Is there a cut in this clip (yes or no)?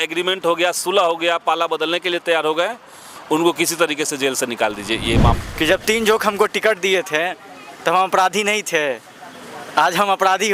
yes